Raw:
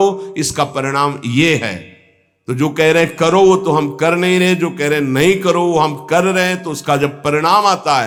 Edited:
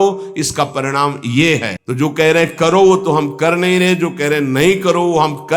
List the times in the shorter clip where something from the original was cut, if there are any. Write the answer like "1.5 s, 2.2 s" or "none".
1.8 s